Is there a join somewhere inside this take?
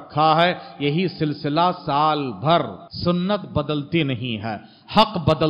yes; 1 cut; at 2.8 s

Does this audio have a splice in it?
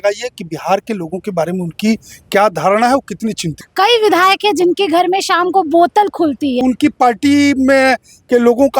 yes; 2 cuts; at 3.6 s, 6.6 s

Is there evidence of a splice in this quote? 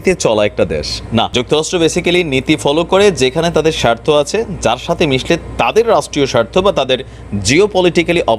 no; 0 cuts

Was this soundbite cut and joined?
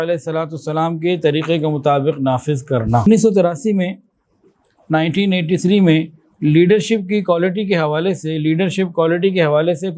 yes; 1 cut; at 3.1 s

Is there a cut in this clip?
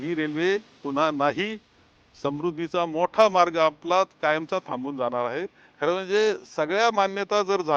yes; 1 cut; at 5.6 s

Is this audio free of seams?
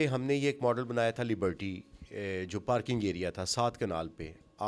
yes; 0 cuts

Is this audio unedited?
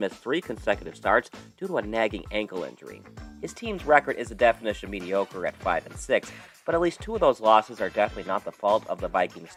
yes; 0 cuts

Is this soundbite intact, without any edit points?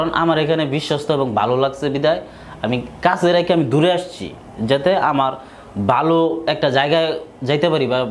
yes; 0 cuts

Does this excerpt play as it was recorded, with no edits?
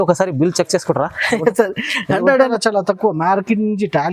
no; 1 cut; at 2.5 s

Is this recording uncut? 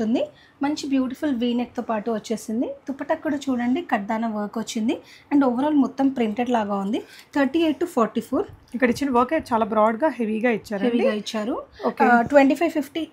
yes; 0 cuts

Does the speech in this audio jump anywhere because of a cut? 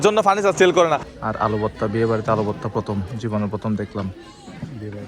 yes; 1 cut; at 1.0 s

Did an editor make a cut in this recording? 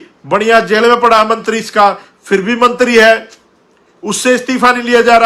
no; 0 cuts

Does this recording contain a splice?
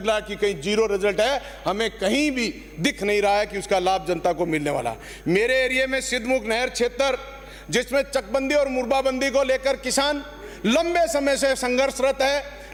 no; 0 cuts

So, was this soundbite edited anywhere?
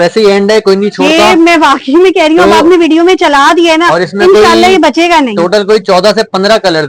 no; 0 cuts

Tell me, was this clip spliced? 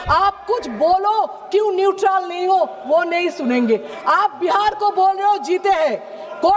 yes; 1 cut; at 3.9 s

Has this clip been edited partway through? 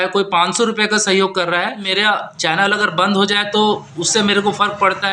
yes; 1 cut; at 1.9 s

